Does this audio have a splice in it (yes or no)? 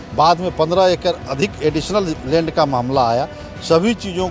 no